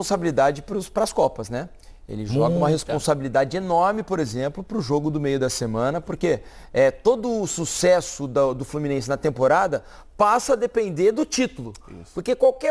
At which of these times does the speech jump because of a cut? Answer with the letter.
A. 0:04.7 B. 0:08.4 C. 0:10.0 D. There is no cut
D